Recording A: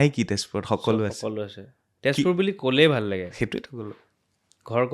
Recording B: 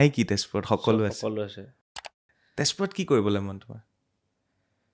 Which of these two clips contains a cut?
B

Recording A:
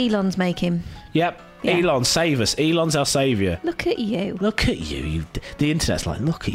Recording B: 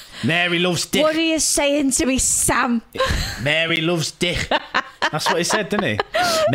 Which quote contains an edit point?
A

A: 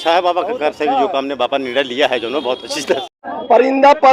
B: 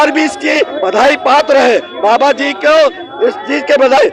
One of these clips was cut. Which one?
A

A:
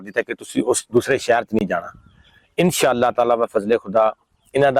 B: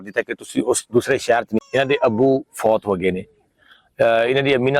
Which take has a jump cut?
B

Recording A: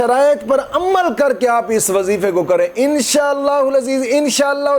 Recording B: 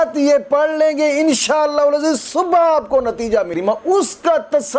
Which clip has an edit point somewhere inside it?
B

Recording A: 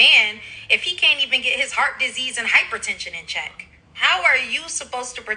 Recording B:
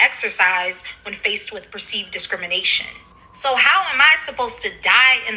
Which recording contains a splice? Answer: B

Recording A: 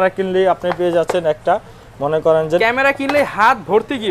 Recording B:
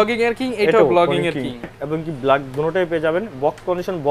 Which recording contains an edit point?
B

